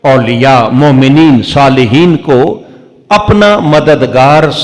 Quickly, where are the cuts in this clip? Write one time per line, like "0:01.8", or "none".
none